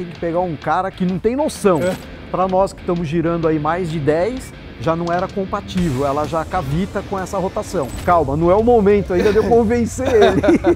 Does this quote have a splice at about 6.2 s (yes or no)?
no